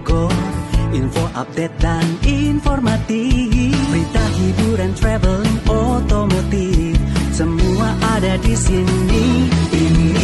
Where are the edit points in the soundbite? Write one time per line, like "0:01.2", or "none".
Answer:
none